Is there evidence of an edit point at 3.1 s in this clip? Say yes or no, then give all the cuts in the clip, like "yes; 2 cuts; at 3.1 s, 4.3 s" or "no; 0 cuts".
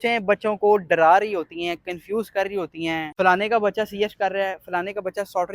yes; 1 cut; at 3.1 s